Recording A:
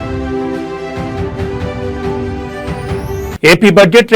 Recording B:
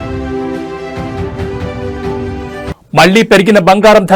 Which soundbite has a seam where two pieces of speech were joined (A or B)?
A